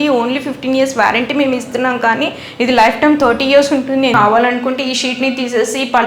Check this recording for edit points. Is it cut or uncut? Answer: cut